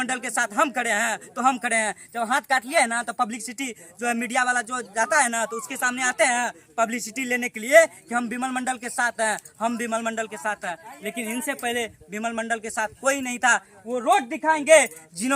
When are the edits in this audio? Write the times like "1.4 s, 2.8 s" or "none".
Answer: none